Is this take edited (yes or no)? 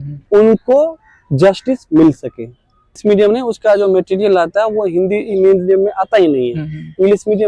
yes